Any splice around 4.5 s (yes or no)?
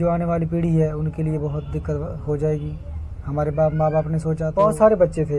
yes